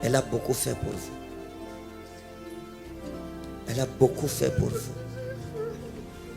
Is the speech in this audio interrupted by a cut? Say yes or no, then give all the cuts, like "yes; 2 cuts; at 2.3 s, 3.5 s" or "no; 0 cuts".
no; 0 cuts